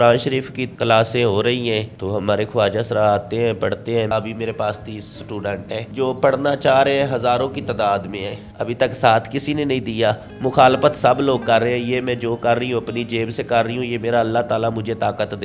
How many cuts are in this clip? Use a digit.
3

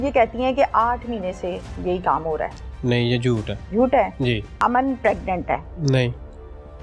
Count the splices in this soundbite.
3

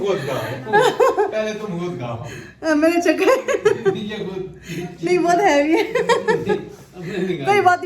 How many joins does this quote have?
0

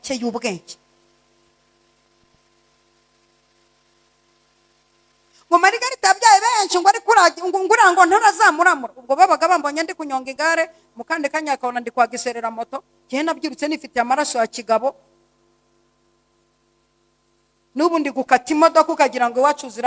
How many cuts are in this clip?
0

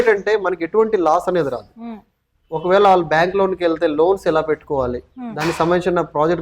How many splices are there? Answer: 1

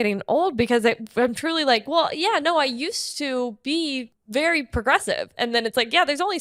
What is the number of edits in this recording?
1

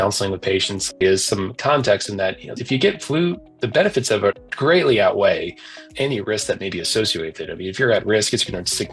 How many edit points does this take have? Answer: 2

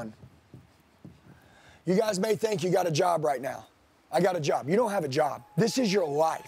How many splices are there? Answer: 1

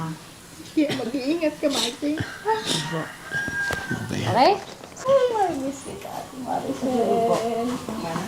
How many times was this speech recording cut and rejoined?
1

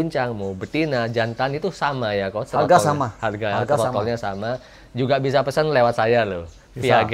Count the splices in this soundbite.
0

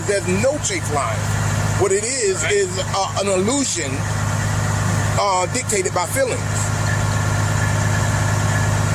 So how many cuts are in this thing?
0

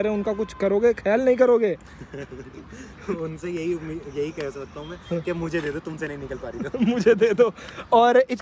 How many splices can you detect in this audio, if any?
0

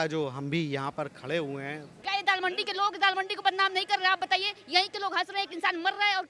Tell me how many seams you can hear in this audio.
1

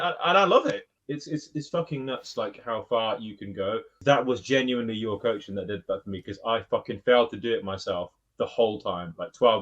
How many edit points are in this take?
2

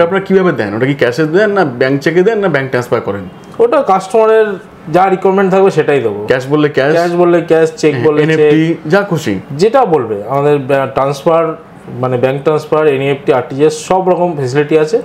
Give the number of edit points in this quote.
0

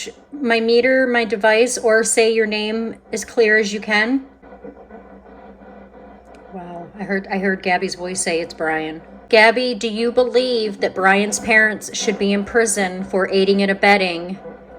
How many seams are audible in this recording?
2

